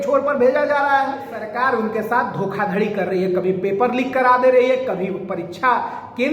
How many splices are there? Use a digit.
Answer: 1